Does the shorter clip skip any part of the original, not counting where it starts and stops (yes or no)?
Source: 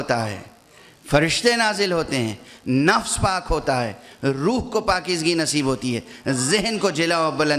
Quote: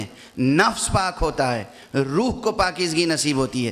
no